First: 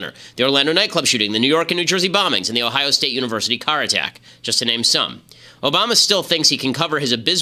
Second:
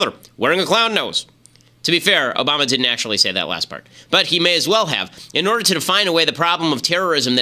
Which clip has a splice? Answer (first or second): second